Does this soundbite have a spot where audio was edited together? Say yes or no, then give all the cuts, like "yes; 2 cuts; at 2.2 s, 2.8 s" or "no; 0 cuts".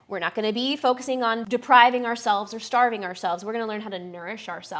yes; 1 cut; at 1.4 s